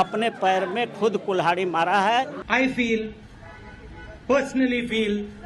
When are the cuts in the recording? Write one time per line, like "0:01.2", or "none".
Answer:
0:02.4